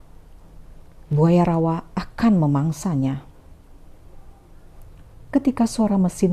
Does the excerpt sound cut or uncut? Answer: cut